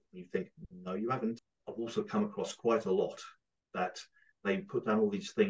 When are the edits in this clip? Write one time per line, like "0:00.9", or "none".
0:01.5